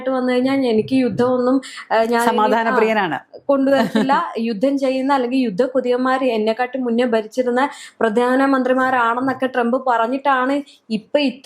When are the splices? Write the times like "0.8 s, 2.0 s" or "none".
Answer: none

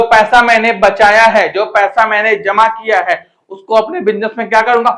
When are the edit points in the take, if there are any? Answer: none

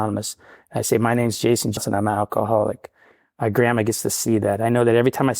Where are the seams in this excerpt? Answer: 1.7 s

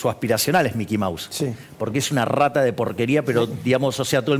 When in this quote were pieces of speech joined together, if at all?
none

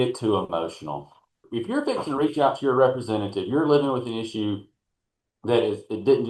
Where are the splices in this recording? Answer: 1.5 s

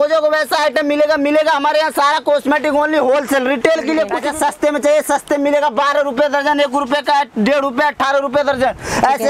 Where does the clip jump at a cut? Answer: 4.2 s

